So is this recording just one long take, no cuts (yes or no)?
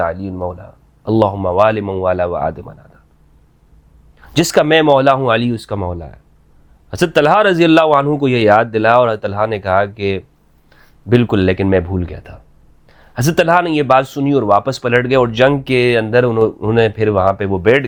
yes